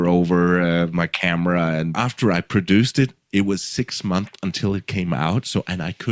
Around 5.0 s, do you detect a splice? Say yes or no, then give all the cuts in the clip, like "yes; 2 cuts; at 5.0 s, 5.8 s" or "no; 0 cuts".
no; 2 cuts; at 0.9 s, 1.9 s